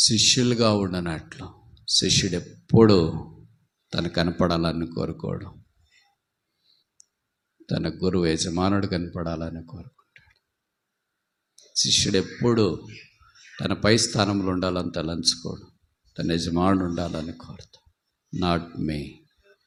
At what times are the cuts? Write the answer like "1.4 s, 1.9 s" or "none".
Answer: none